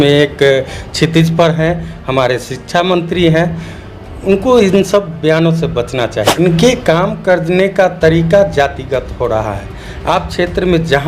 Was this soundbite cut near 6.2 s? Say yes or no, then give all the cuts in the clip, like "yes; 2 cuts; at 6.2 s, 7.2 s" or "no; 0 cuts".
yes; 1 cut; at 6.2 s